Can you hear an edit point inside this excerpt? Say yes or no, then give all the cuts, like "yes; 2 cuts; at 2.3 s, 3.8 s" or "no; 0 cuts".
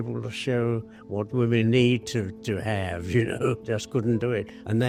no; 0 cuts